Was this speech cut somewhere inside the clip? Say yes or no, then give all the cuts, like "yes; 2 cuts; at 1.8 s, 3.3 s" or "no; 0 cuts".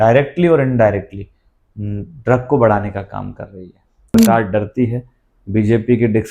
yes; 1 cut; at 3.9 s